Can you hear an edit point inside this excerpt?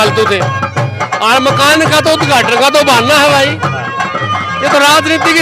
no; 0 cuts

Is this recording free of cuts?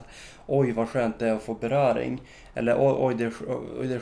yes; 0 cuts

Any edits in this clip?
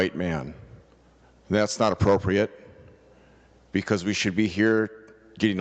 no; 0 cuts

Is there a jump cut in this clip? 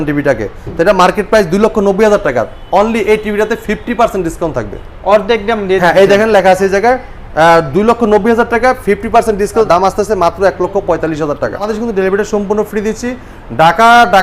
yes; 2 cuts; at 9.7 s, 11.7 s

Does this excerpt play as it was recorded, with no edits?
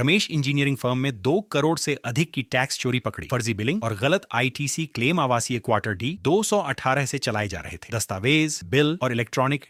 yes; 0 cuts

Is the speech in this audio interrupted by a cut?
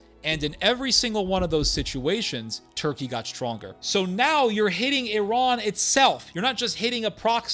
yes; 1 cut; at 3.7 s

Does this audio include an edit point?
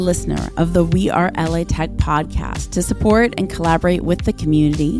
no; 0 cuts

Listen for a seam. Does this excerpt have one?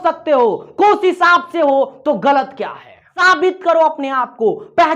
yes; 1 cut; at 3.2 s

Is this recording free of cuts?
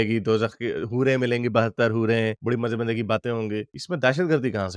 yes; 0 cuts

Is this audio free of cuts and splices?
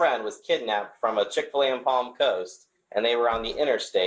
yes; 0 cuts

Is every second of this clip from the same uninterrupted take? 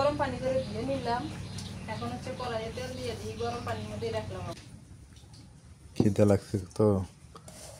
no; 1 cut; at 4.6 s

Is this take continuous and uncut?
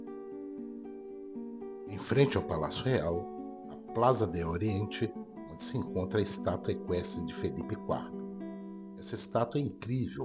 no; 1 cut; at 2.0 s

